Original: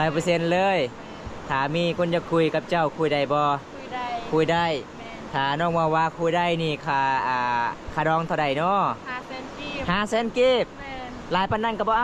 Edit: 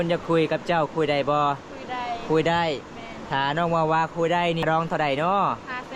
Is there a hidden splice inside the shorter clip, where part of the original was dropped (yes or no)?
yes